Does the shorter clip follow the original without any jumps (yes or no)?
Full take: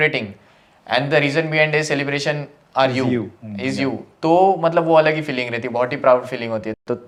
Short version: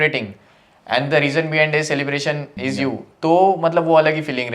no